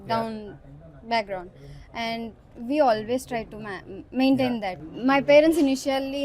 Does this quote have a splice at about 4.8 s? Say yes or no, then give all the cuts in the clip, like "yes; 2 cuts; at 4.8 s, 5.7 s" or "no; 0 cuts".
yes; 1 cut; at 4.8 s